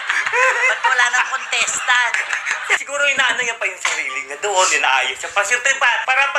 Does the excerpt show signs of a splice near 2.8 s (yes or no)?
yes